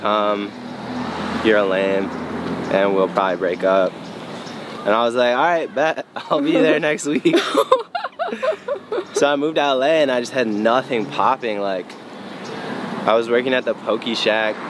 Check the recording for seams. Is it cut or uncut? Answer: uncut